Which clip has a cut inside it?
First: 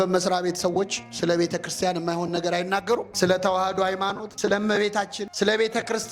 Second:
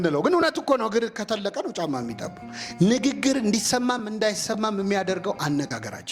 first; 3 cuts; at 3.1 s, 4.3 s, 5.2 s

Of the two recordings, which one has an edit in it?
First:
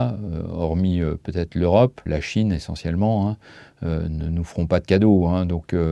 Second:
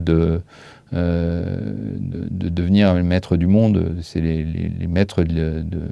first; 1 cut; at 2.0 s

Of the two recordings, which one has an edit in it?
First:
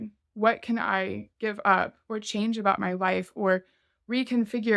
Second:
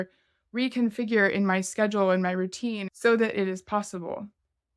second; 1 cut; at 2.9 s

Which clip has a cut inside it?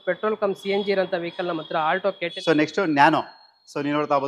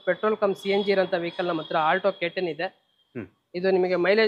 first; 1 cut; at 2.3 s

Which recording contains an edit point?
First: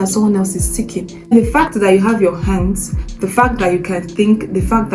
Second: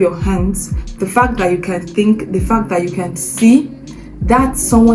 first; 1 cut; at 1.3 s

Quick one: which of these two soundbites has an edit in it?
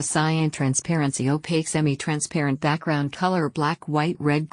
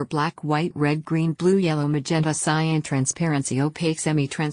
first; 2 cuts; at 1.0 s, 2.5 s

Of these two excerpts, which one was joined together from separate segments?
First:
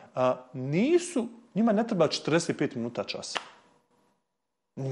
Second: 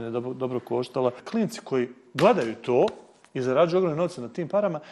second; 1 cut; at 1.2 s

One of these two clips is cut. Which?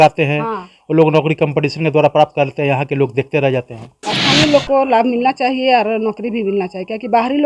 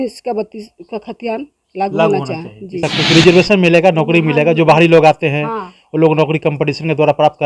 second; 1 cut; at 2.8 s

